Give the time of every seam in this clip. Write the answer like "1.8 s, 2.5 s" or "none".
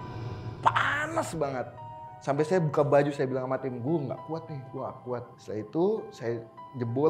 5.3 s